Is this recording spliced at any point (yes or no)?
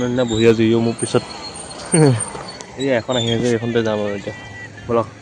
no